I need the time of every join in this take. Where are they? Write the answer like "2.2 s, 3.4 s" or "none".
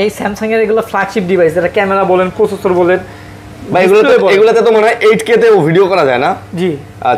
none